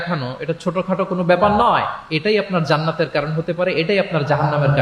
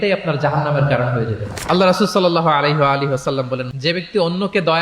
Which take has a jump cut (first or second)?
second